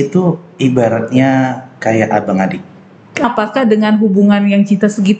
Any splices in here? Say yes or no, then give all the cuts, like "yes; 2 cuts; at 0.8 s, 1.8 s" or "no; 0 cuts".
yes; 1 cut; at 3.2 s